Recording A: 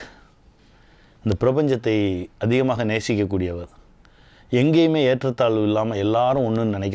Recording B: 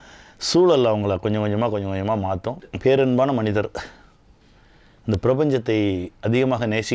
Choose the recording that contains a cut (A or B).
B